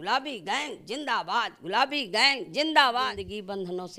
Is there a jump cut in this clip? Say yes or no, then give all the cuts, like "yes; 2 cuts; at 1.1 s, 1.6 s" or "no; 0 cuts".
yes; 1 cut; at 3.1 s